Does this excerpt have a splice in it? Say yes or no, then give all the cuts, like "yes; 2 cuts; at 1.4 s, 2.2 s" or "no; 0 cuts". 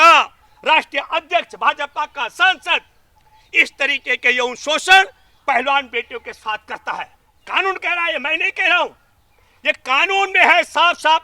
no; 0 cuts